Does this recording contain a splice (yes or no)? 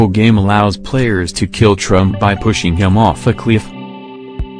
yes